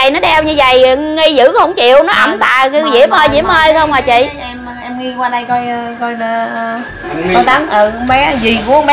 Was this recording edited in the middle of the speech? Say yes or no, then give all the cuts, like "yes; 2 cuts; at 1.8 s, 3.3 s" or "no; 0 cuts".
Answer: no; 0 cuts